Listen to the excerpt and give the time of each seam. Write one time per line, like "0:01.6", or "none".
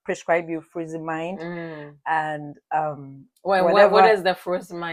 none